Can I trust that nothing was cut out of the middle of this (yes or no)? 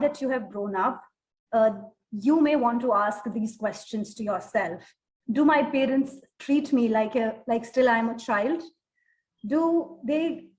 yes